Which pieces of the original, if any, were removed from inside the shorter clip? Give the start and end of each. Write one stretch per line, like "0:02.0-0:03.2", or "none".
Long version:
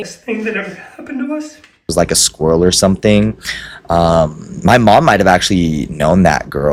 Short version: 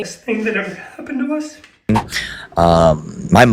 0:01.9-0:03.2